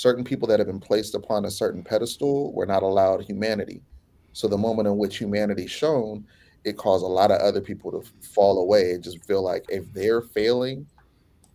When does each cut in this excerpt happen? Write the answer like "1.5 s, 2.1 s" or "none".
none